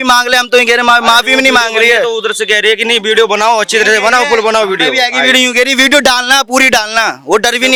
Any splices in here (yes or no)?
no